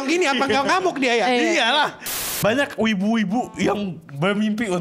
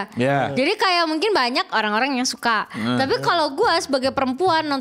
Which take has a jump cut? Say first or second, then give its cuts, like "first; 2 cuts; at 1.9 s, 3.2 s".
first; 1 cut; at 2.1 s